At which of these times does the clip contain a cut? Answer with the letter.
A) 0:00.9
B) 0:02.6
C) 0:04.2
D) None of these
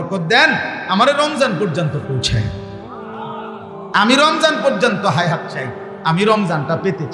D